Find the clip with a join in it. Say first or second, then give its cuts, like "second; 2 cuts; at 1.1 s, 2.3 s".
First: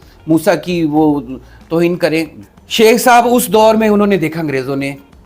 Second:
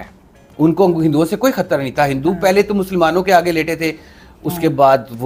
first; 1 cut; at 2.4 s